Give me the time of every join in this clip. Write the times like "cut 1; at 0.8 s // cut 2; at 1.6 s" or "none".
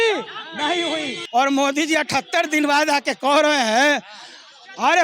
cut 1; at 1.1 s

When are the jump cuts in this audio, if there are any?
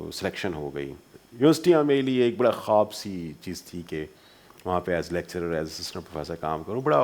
cut 1; at 1.1 s

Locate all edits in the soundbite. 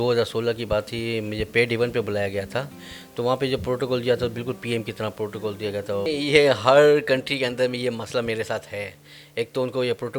cut 1; at 6.1 s

